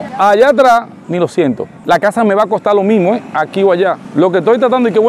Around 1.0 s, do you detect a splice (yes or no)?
yes